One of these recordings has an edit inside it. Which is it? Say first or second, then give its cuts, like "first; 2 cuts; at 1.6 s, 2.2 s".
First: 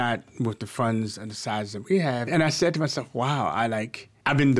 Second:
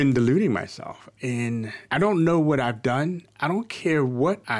first; 1 cut; at 2.3 s